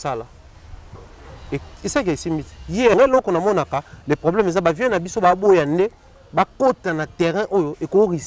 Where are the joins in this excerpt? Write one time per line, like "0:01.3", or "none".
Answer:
0:02.9